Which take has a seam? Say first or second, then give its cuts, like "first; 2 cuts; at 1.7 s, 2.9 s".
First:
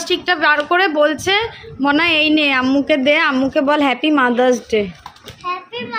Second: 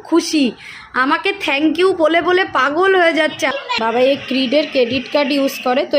second; 1 cut; at 3.5 s